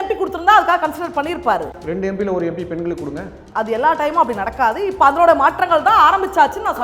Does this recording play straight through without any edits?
no; 2 cuts; at 1.7 s, 3.4 s

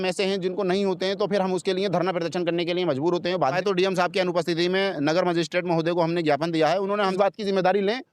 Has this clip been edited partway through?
yes; 2 cuts; at 3.6 s, 7.1 s

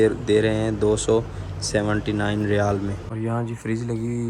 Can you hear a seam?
yes; 1 cut; at 3.0 s

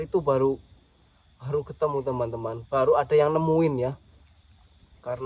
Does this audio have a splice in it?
no; 0 cuts

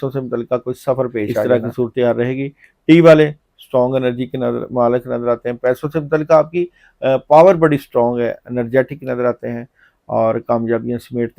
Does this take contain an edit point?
yes; 1 cut; at 1.5 s

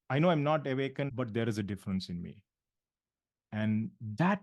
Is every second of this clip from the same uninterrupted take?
no; 1 cut; at 1.1 s

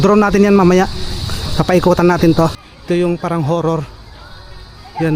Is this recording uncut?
no; 1 cut; at 2.7 s

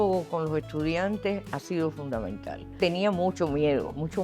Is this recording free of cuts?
no; 1 cut; at 2.7 s

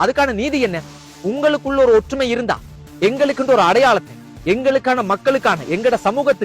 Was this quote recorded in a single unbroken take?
no; 1 cut; at 1.1 s

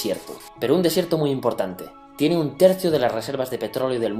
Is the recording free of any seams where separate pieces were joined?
no; 1 cut; at 2.8 s

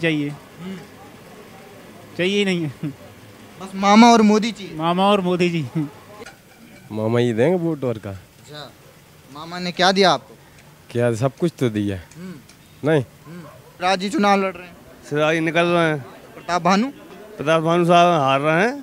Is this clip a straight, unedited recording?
no; 2 cuts; at 6.2 s, 13.7 s

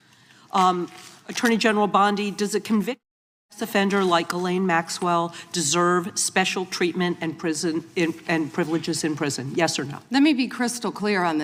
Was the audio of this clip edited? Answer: no; 0 cuts

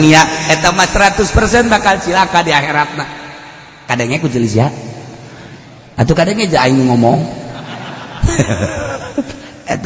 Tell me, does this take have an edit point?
no; 0 cuts

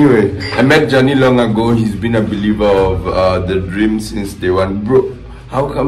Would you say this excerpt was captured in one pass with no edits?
yes; 0 cuts

